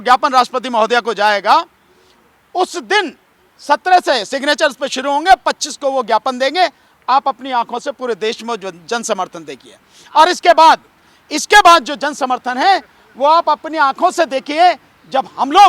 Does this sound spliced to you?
no; 0 cuts

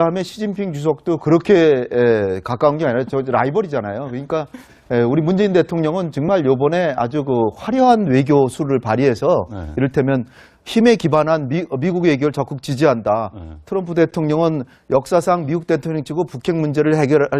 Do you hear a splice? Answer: yes; 1 cut; at 12.6 s

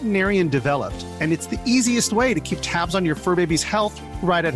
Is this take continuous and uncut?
yes; 0 cuts

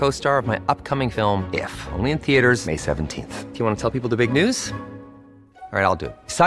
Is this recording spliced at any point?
no; 0 cuts

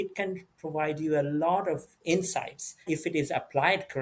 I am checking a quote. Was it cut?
yes; 2 cuts; at 2.0 s, 2.8 s

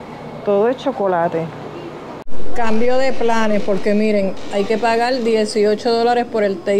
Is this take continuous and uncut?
no; 1 cut; at 2.0 s

